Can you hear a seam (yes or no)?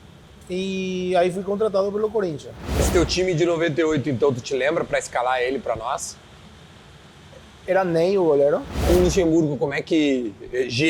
yes